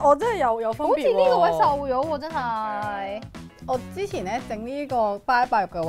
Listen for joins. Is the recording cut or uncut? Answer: cut